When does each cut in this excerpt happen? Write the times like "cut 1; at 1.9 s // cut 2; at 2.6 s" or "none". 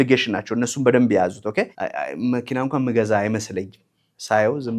cut 1; at 1.8 s